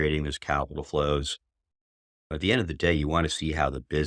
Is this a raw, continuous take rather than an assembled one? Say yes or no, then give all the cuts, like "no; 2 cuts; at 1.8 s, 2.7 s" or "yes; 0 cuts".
yes; 0 cuts